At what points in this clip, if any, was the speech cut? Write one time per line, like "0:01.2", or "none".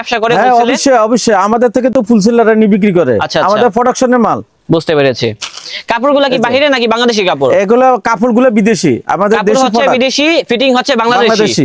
none